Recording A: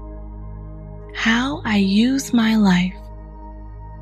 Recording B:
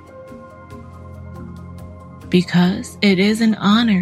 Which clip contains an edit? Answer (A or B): A